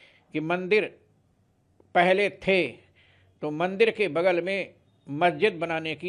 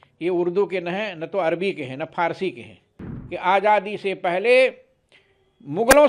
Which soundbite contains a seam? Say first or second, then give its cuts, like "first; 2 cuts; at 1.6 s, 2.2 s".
second; 1 cut; at 2.9 s